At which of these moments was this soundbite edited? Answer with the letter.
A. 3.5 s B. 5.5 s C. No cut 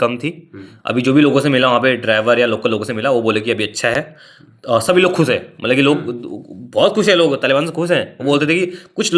C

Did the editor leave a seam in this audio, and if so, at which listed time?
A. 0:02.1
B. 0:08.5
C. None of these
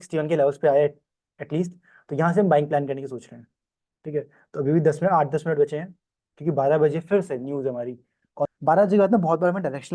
B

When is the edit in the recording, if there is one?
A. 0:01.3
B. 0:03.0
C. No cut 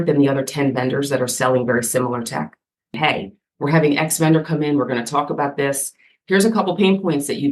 B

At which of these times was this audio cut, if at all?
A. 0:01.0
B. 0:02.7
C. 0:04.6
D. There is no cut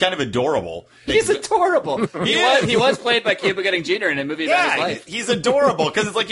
A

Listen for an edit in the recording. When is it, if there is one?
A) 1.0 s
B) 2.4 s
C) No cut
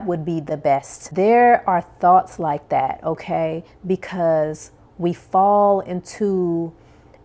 A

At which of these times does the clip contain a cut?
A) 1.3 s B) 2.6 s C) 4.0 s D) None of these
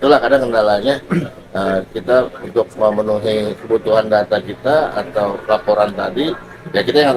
D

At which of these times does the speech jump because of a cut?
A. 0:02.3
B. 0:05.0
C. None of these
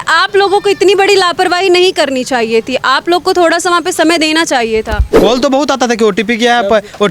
B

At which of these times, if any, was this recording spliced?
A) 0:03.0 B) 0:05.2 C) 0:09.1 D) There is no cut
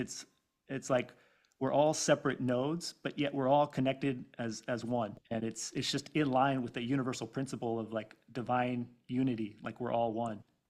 B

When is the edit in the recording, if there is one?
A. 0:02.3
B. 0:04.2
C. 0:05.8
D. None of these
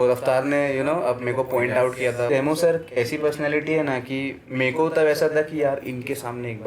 A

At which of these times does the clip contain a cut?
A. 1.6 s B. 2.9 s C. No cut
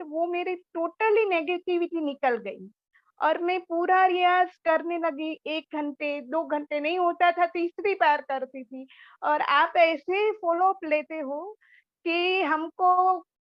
C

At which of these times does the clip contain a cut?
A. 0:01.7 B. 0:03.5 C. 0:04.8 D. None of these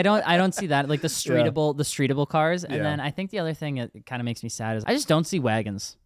C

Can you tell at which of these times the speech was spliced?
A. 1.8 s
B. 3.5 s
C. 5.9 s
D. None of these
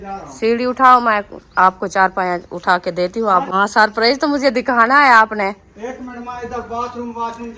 B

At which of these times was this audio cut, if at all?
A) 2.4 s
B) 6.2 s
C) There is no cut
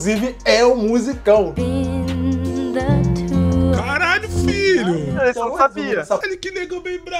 B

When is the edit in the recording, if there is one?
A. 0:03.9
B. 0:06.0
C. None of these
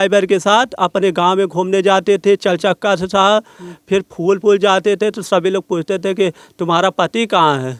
C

